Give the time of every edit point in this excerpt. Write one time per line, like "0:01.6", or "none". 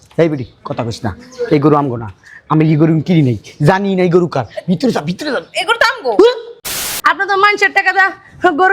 0:06.9